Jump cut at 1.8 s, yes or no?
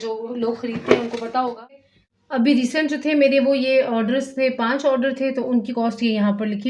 yes